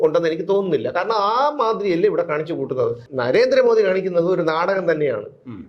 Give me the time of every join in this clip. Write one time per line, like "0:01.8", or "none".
0:03.0